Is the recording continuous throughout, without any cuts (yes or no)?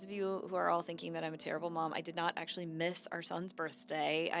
yes